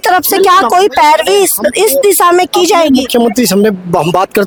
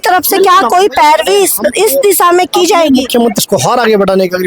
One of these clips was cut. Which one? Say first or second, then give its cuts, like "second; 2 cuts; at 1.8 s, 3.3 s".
second; 1 cut; at 3.4 s